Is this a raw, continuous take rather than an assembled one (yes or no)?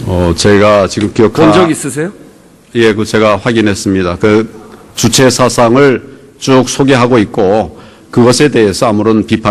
yes